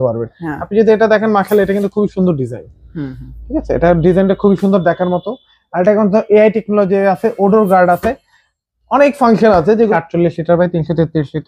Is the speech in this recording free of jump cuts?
no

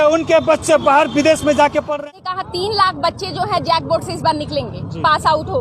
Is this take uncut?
no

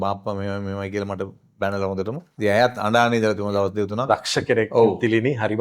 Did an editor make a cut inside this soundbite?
yes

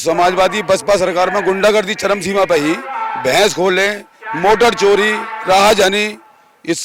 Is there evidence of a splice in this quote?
no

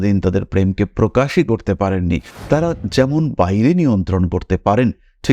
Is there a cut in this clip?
yes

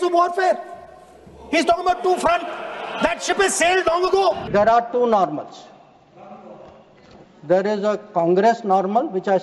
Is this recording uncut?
no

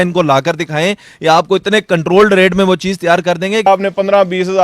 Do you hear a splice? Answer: yes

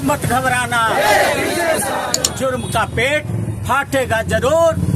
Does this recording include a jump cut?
yes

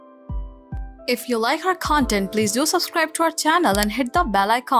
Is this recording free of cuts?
no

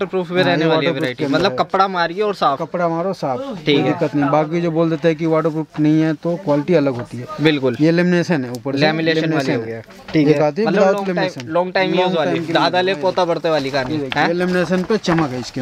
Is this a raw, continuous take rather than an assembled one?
yes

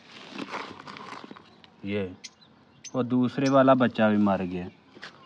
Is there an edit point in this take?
no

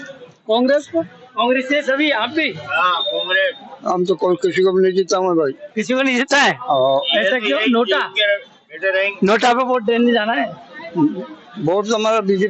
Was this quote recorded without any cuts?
yes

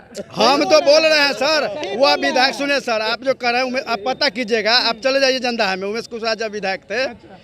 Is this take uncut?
yes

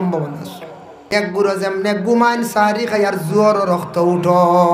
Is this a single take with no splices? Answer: no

